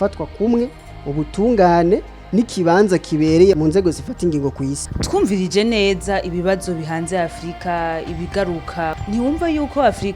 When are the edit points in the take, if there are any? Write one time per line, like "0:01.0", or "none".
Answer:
0:04.8